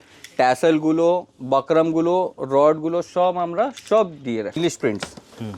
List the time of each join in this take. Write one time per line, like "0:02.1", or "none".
0:04.6